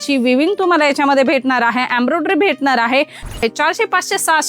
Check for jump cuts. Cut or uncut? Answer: cut